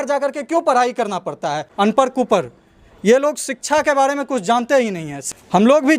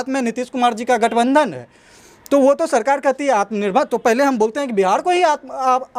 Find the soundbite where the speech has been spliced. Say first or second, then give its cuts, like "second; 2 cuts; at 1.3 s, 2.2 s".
first; 2 cuts; at 1.6 s, 5.1 s